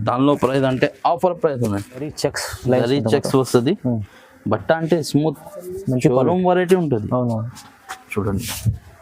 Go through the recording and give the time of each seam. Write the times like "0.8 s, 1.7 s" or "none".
2.1 s